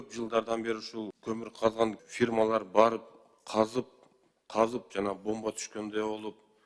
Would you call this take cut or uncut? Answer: cut